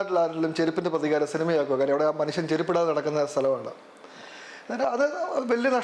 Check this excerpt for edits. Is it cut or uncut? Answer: uncut